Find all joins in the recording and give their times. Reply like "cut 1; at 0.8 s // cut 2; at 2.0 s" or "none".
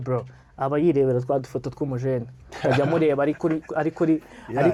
none

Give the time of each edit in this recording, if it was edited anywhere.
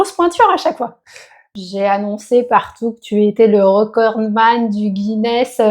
cut 1; at 1.4 s

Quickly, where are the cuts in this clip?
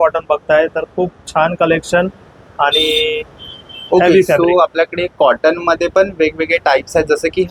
none

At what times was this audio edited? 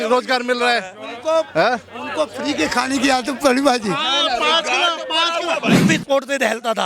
cut 1; at 5.8 s

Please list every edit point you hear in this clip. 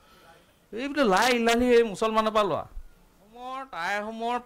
cut 1; at 3.5 s

